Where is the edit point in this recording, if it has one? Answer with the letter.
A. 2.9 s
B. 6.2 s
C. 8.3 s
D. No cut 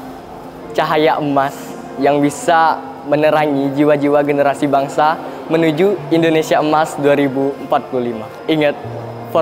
C